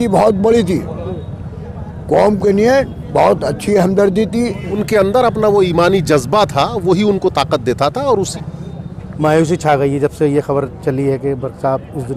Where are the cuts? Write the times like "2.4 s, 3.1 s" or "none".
4.7 s, 8.3 s